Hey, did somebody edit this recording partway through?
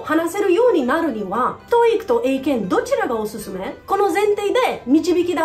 no; 0 cuts

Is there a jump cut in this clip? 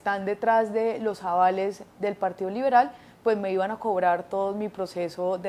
no; 0 cuts

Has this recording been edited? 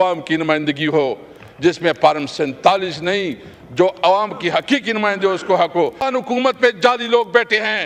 yes; 1 cut; at 6.1 s

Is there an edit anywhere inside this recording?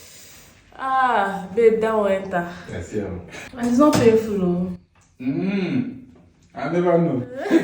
yes; 1 cut; at 3.3 s

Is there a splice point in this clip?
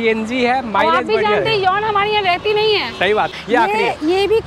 yes; 1 cut; at 3.3 s

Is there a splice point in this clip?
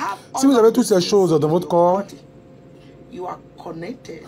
no; 0 cuts

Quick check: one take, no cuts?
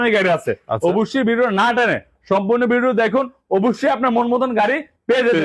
yes; 0 cuts

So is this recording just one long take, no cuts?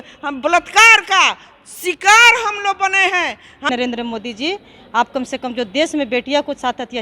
no; 1 cut; at 3.7 s

